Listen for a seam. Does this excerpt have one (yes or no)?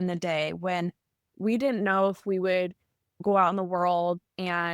yes